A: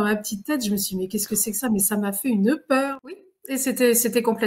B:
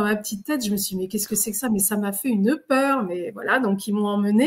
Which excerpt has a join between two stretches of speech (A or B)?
A